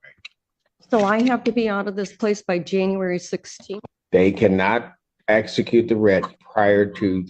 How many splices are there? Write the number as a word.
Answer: zero